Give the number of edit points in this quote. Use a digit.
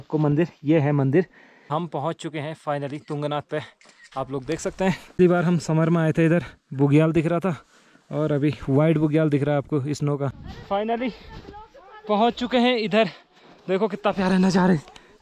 3